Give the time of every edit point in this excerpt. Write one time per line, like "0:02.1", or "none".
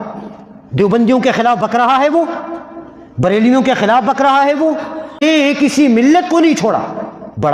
0:05.2